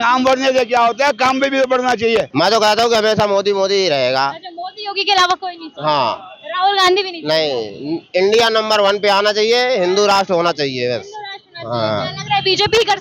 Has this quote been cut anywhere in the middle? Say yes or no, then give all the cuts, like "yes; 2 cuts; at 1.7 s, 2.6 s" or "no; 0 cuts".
yes; 1 cut; at 2.3 s